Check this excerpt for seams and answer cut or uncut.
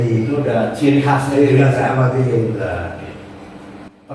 uncut